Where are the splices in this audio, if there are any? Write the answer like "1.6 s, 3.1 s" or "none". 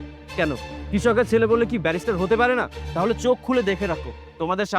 2.8 s